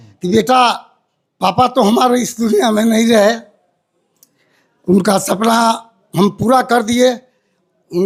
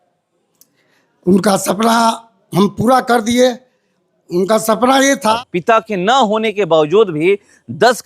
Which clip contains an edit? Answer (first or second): second